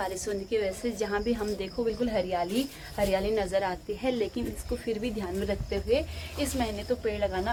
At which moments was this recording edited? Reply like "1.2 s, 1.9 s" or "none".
none

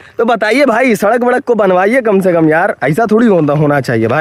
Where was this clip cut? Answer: none

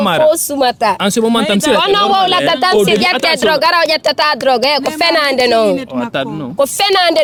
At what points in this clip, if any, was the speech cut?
none

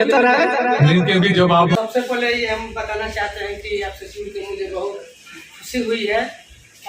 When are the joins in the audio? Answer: 1.8 s

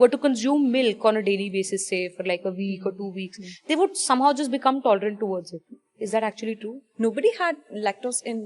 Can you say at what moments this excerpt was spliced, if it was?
5.9 s, 6.8 s

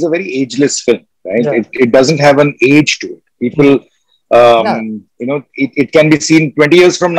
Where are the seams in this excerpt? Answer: none

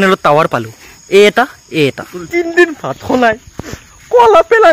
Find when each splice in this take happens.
2.3 s

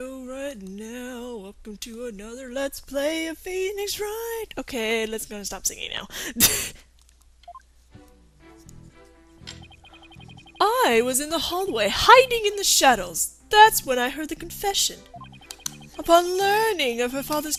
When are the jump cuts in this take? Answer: none

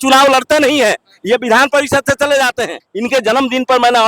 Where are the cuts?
2.9 s

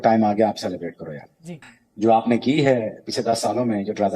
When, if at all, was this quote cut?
none

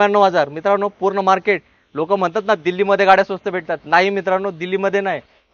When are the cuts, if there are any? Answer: none

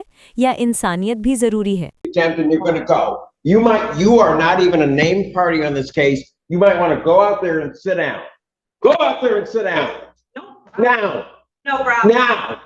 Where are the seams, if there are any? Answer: 2.0 s

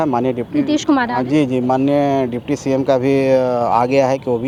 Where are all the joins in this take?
none

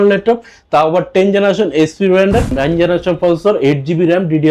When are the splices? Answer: 2.5 s

